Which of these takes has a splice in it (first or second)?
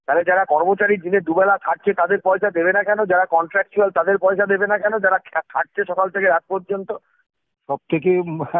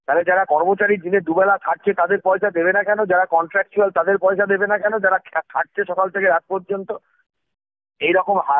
first